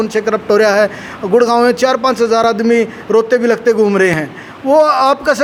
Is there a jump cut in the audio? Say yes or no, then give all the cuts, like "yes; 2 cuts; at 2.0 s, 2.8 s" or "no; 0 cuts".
no; 0 cuts